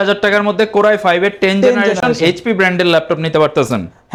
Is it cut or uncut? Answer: uncut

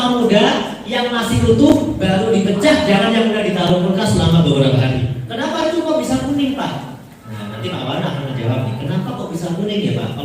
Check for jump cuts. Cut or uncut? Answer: cut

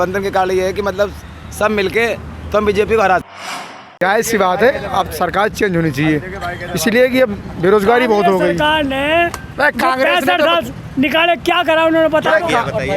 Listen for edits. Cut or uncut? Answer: cut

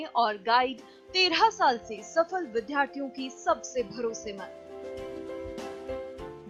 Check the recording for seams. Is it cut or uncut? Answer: uncut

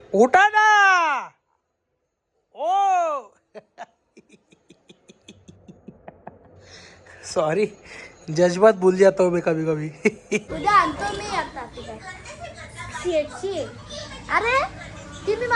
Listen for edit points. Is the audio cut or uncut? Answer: cut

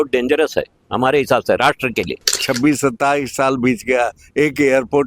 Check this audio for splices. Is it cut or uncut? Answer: cut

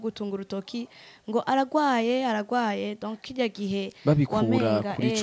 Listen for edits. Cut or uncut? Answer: uncut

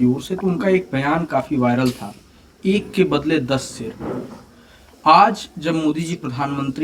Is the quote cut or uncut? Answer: uncut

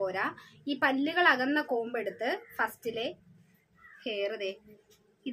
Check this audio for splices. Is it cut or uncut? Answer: uncut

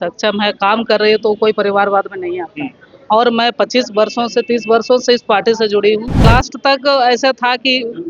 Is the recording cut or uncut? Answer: cut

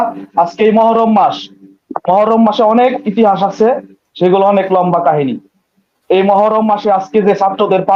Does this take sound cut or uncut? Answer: uncut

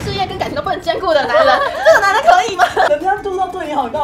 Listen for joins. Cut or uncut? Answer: cut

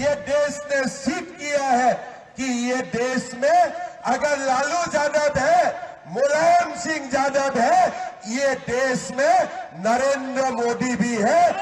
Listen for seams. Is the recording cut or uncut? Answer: uncut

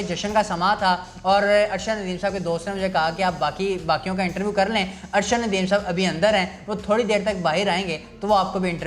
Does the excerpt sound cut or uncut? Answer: uncut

